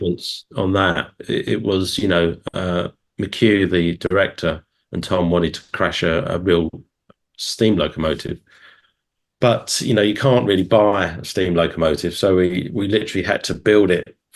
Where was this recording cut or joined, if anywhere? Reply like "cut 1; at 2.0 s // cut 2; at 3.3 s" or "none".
none